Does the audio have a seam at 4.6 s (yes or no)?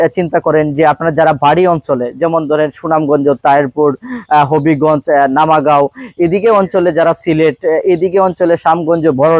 no